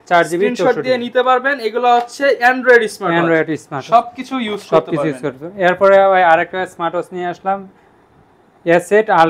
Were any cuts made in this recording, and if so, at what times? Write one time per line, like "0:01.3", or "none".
none